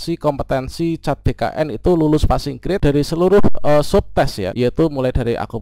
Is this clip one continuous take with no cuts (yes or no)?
no